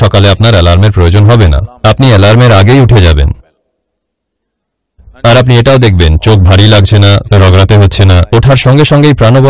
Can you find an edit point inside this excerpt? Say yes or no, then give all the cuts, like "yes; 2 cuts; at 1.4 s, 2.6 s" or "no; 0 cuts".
no; 0 cuts